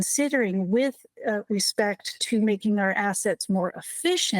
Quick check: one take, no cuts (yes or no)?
yes